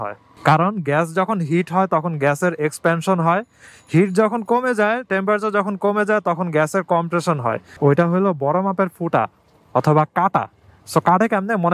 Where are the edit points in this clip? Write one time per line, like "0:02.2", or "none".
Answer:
0:07.7